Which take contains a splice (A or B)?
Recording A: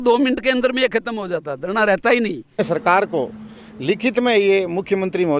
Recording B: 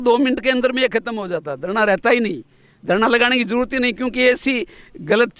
A